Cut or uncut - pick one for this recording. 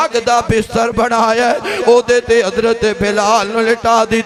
uncut